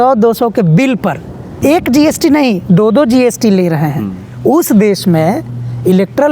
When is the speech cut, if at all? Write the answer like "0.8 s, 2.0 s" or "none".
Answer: 1.5 s